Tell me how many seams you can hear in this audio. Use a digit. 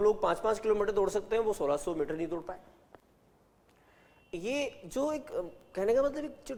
0